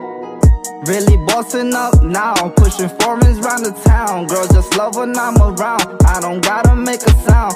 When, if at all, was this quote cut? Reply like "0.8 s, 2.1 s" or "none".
none